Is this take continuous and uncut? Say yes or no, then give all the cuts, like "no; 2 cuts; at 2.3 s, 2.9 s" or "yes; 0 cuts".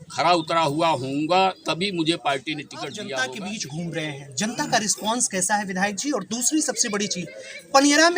no; 1 cut; at 3.1 s